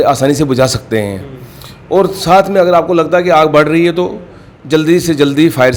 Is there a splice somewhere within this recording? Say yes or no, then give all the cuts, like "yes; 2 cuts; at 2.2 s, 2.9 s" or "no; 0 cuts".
no; 0 cuts